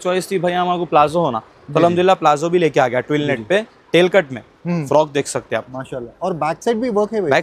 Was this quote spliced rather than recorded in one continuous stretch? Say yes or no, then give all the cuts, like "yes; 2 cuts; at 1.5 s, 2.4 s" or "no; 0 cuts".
no; 0 cuts